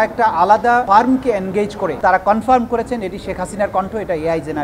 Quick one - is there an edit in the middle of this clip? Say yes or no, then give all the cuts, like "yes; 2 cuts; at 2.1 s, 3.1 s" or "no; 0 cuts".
yes; 1 cut; at 2.0 s